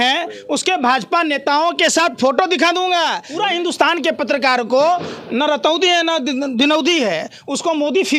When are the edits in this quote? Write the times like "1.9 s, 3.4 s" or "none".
3.2 s